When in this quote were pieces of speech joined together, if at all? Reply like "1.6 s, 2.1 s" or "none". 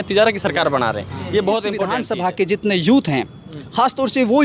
2.0 s